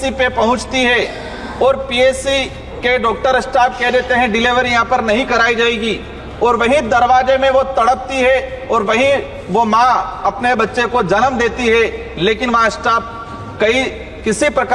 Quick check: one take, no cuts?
yes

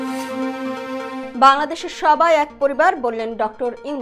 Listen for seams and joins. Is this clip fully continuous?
yes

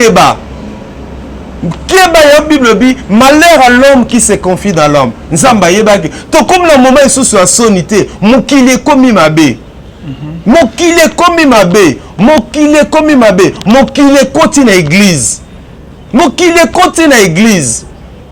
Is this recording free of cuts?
yes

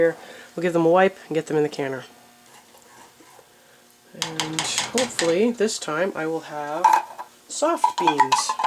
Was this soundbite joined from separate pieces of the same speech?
yes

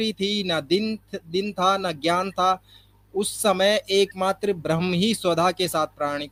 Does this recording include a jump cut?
no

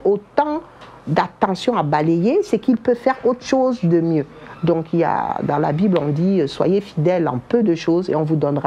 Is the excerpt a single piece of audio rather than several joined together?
yes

